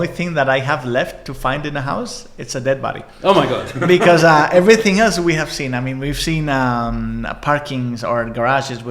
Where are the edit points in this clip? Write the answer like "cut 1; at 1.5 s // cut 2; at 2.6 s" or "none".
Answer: none